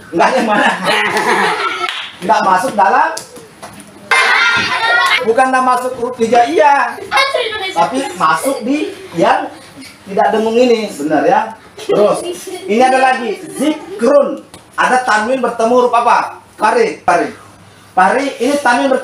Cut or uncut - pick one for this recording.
cut